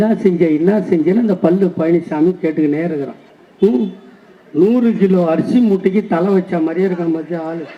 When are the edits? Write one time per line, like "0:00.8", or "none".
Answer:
none

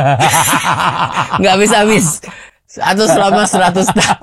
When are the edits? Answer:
none

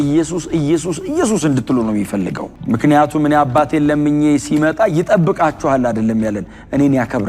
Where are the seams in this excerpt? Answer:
none

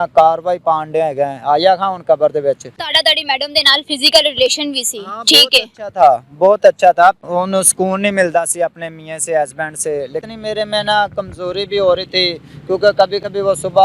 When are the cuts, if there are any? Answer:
0:02.8
0:07.2
0:10.2

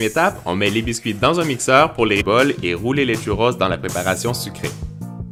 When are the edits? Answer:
none

